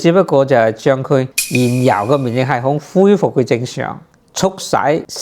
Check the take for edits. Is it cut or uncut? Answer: cut